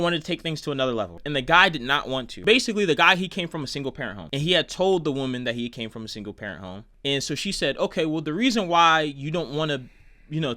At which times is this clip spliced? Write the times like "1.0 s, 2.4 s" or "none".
1.2 s, 2.3 s